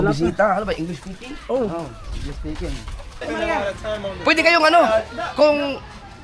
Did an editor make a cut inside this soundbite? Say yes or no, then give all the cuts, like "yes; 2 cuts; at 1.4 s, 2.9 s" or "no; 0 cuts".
yes; 1 cut; at 3.3 s